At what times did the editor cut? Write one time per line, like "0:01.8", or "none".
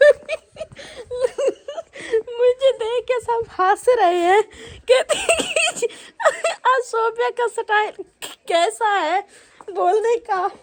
none